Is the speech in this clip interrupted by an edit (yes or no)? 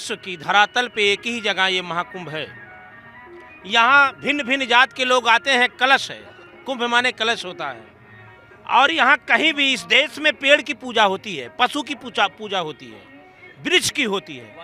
no